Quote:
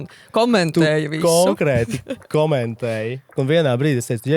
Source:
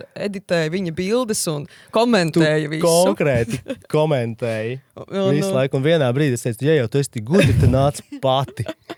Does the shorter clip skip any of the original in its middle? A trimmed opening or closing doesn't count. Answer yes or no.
yes